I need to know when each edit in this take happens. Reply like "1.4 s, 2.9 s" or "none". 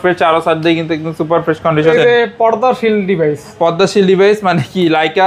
1.9 s